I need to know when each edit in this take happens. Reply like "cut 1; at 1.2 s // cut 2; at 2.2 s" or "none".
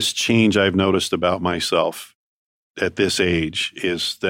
none